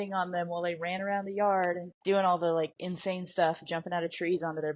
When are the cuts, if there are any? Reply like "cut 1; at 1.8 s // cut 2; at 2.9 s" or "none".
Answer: cut 1; at 1.9 s // cut 2; at 2.8 s